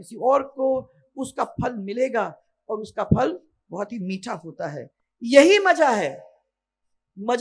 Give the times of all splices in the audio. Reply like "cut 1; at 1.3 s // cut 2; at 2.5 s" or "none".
cut 1; at 5.0 s